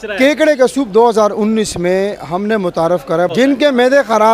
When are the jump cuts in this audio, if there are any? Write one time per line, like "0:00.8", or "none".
0:03.3

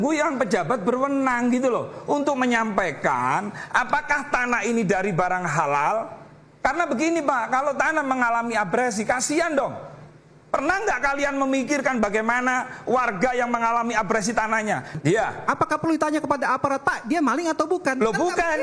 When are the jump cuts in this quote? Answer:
0:14.9

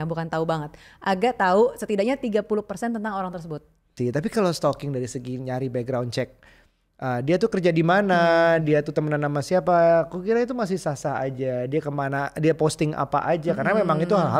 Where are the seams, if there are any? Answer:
0:03.9

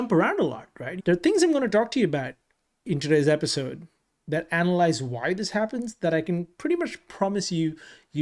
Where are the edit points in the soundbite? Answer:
0:00.9

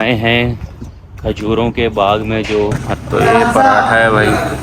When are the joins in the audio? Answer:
0:02.9

